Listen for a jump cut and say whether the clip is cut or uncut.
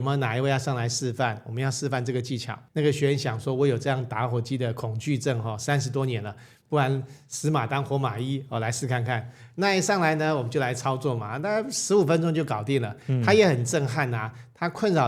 uncut